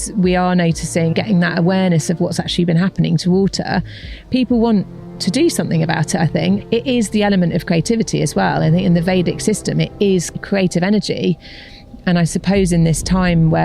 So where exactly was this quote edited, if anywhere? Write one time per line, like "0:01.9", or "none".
0:01.1
0:06.6
0:10.3